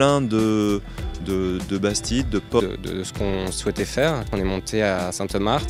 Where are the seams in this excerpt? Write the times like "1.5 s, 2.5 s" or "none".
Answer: none